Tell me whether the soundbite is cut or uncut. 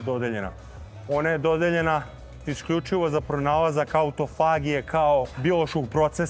cut